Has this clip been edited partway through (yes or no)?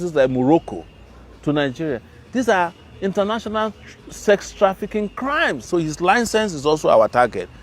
yes